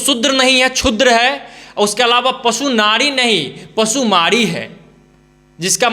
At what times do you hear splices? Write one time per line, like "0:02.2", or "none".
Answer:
none